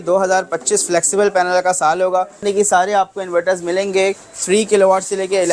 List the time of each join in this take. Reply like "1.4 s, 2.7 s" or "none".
2.4 s

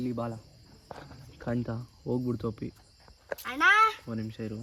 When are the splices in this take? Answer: none

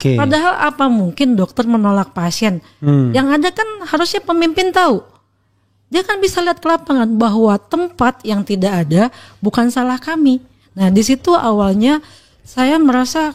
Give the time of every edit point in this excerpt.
none

